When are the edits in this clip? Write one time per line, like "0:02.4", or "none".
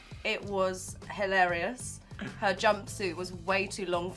none